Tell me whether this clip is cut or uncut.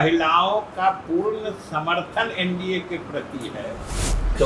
uncut